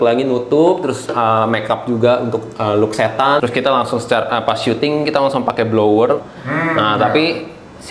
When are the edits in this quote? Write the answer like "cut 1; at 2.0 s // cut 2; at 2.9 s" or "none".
cut 1; at 3.4 s // cut 2; at 6.3 s